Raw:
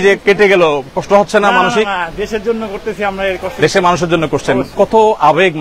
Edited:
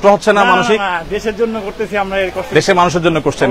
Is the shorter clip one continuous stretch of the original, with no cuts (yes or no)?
yes